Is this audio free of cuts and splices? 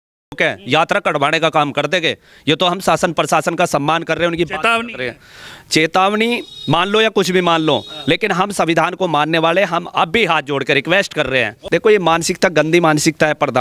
yes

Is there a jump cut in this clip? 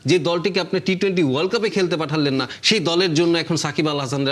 no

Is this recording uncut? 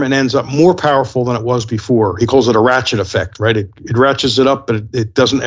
yes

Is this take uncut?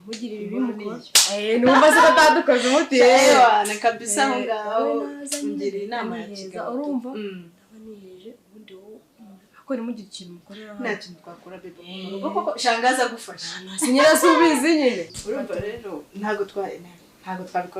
no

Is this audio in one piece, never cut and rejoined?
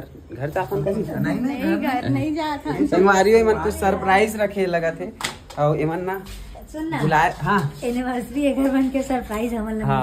yes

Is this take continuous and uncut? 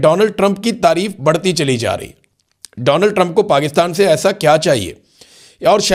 yes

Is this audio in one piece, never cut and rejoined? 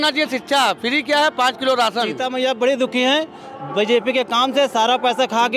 no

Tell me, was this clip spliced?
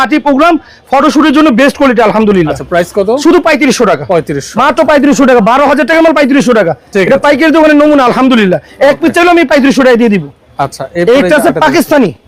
no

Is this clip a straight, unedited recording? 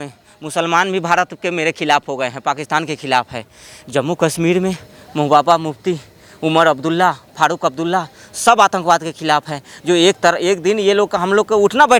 yes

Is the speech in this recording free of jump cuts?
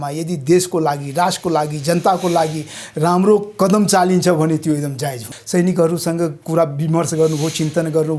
no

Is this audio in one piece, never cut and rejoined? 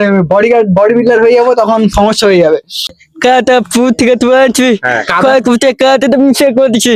no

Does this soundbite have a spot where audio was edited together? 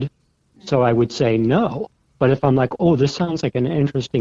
no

